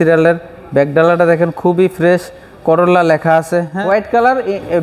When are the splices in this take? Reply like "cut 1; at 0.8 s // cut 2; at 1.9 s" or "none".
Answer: cut 1; at 3.7 s